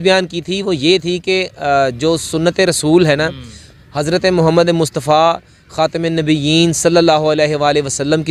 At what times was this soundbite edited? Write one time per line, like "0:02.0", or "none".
none

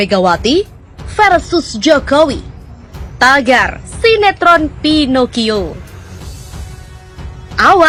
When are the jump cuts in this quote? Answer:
none

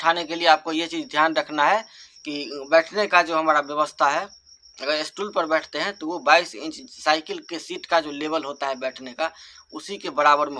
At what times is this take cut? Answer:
none

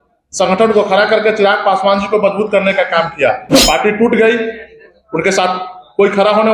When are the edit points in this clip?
0:03.4

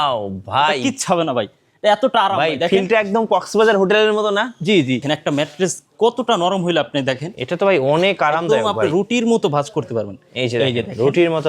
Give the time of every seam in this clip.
0:05.0

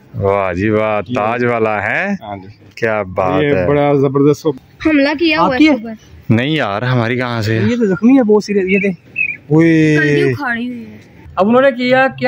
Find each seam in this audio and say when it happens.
0:04.7
0:11.2

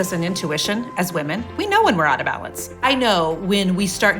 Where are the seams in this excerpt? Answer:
0:02.8

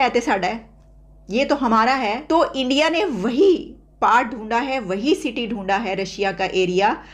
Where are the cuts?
0:02.2

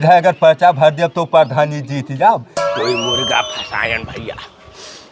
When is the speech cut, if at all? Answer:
0:02.6

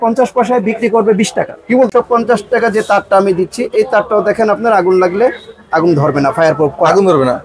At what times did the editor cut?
0:01.9

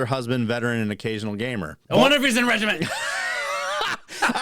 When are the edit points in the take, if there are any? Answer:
0:01.8

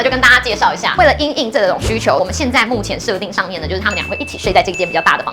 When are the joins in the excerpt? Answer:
0:00.9

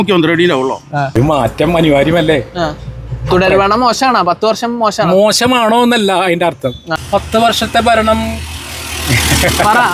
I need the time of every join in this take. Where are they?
0:01.1
0:06.9

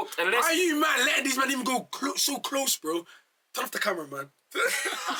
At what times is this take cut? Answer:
none

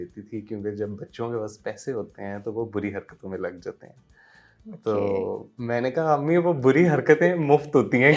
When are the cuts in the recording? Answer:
none

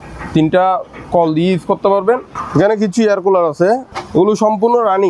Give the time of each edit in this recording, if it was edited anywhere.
0:02.4
0:03.9

